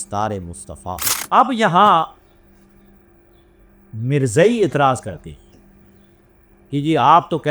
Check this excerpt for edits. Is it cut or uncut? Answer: cut